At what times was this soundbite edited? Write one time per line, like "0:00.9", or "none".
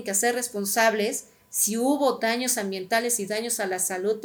none